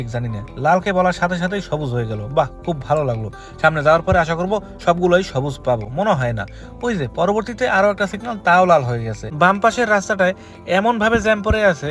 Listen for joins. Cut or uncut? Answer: cut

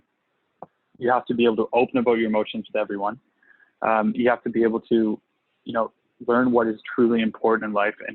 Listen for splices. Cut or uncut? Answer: uncut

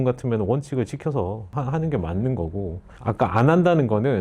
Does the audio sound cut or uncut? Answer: cut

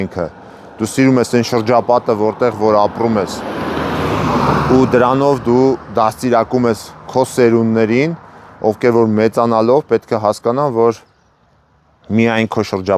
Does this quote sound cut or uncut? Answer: uncut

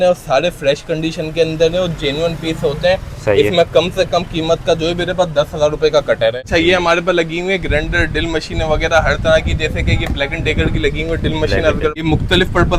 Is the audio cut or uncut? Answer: cut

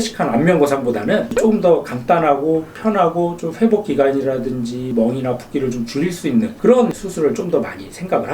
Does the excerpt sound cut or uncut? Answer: uncut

